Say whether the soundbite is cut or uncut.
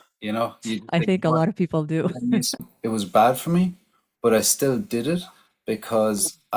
cut